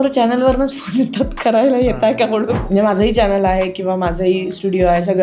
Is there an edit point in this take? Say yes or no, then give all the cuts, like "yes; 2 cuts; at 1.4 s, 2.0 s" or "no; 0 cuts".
yes; 1 cut; at 2.6 s